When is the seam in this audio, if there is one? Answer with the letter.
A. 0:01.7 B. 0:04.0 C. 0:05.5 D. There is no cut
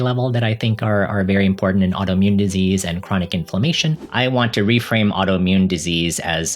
B